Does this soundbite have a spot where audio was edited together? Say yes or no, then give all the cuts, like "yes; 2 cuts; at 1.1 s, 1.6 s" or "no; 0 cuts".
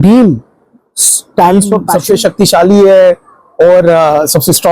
yes; 1 cut; at 1.9 s